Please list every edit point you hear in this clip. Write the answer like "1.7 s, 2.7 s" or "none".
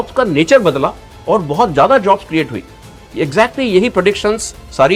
none